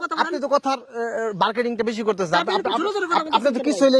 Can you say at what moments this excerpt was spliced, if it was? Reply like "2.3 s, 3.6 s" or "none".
none